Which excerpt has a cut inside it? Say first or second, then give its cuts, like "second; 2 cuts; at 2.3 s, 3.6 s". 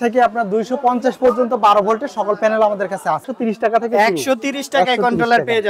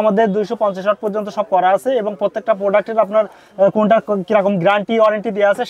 first; 1 cut; at 3.3 s